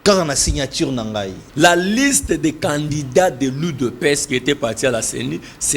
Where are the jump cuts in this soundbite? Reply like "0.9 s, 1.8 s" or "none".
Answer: 1.4 s